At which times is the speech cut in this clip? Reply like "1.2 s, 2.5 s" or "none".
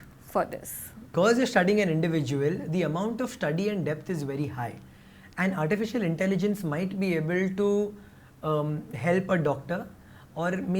1.1 s